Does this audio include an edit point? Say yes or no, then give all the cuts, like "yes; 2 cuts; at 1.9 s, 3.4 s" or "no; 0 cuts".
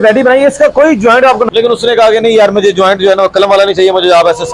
yes; 1 cut; at 1.5 s